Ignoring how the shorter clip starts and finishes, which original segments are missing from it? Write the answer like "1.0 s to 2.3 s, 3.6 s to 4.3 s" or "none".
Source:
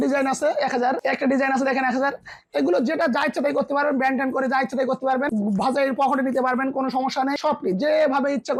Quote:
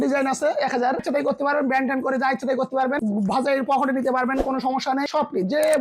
1.0 s to 3.3 s